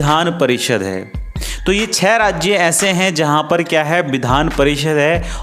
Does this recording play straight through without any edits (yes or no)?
yes